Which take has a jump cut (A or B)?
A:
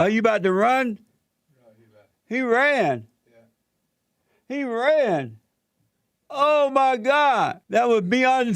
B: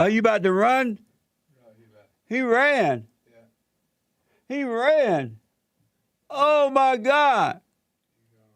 A